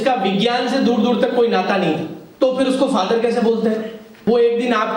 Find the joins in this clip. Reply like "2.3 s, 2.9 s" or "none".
2.2 s, 4.0 s